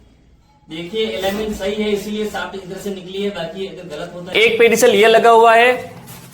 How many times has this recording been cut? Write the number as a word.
one